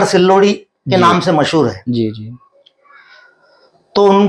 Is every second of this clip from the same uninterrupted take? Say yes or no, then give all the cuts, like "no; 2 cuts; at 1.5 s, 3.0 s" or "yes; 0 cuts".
yes; 0 cuts